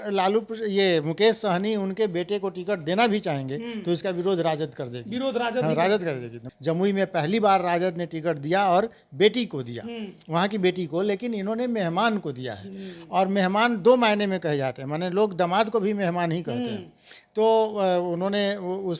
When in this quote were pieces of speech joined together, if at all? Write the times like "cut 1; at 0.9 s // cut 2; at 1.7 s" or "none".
cut 1; at 6.4 s